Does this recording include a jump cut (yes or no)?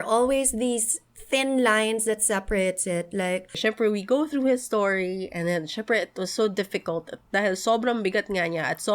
yes